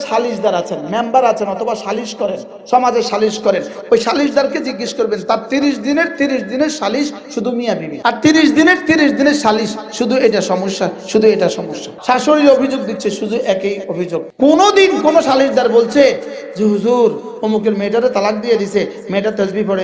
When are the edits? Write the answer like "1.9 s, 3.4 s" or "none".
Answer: 7.9 s, 11.9 s, 14.3 s